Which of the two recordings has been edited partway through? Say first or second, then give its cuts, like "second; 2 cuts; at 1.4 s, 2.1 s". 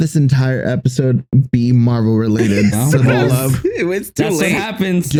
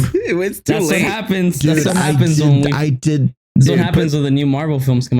second; 1 cut; at 3.3 s